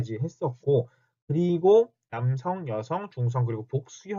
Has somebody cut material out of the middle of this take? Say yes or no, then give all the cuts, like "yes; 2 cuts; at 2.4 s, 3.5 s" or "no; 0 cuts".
yes; 1 cut; at 3.1 s